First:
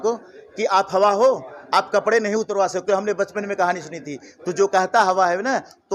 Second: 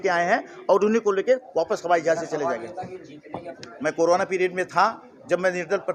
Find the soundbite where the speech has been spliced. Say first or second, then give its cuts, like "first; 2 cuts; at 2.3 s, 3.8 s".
second; 1 cut; at 3.5 s